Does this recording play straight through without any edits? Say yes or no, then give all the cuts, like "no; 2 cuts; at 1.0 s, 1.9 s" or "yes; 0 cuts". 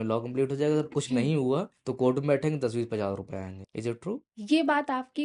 yes; 0 cuts